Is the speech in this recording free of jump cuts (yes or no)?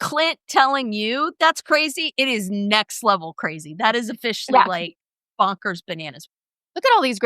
no